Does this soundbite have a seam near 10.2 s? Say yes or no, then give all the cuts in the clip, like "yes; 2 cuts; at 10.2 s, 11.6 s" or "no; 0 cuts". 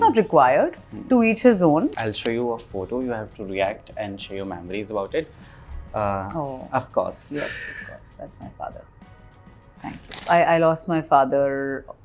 yes; 2 cuts; at 2.0 s, 10.2 s